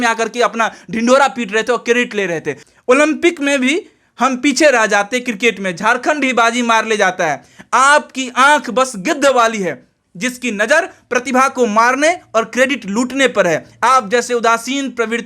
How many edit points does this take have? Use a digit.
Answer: 1